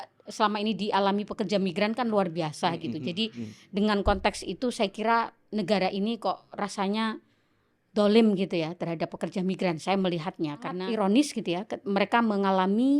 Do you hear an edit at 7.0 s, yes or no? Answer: no